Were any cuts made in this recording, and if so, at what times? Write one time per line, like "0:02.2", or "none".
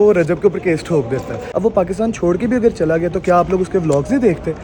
0:01.4

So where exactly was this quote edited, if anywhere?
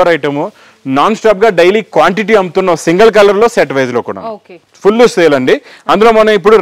none

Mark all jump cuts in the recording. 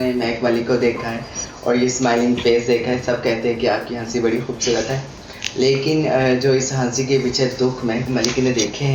none

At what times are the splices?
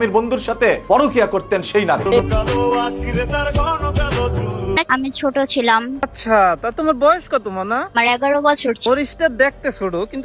0:02.2

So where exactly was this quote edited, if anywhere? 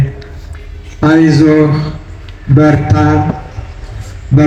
none

